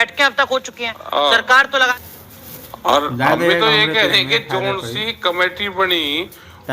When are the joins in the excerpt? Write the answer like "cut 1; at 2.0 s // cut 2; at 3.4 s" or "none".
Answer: cut 1; at 1.9 s